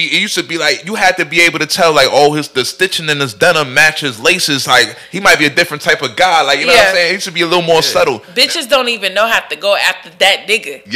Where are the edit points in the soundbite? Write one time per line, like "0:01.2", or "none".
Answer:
0:08.3